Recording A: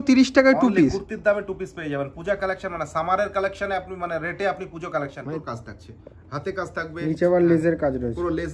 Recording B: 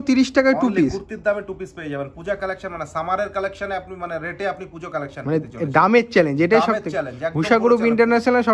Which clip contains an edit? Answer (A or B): A